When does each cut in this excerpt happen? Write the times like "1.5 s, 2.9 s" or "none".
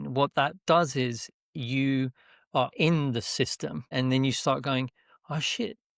3.9 s